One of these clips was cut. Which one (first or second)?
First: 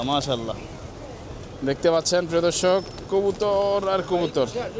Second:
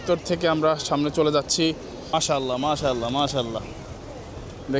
second